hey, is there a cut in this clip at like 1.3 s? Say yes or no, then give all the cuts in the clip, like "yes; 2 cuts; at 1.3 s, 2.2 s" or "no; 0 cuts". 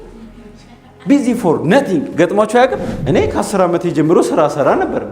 no; 1 cut; at 2.9 s